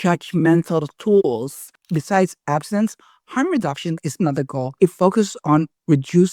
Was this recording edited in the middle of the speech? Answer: yes; 1 cut; at 1.8 s

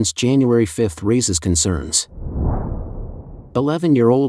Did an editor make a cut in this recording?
yes; 2 cuts; at 2.1 s, 3.1 s

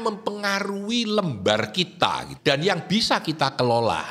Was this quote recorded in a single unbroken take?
no; 1 cut; at 2.3 s

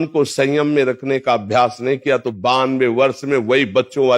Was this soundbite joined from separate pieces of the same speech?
no; 0 cuts

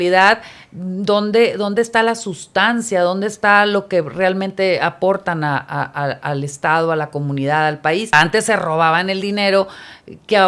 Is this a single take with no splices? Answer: no; 1 cut; at 8.1 s

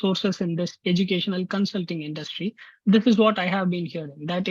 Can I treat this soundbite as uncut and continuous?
yes; 0 cuts

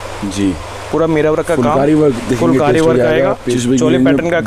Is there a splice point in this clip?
yes; 1 cut; at 3.6 s

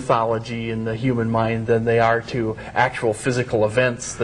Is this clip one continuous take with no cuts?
no; 1 cut; at 3.1 s

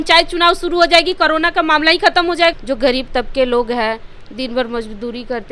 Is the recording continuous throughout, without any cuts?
no; 1 cut; at 2.5 s

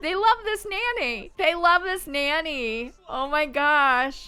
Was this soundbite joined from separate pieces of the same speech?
no; 0 cuts

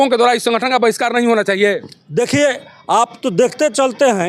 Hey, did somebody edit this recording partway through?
no; 0 cuts

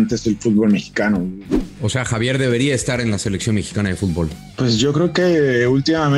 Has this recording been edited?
yes; 2 cuts; at 1.6 s, 4.4 s

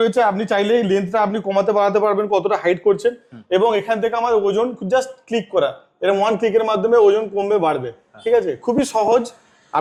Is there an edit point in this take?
no; 0 cuts

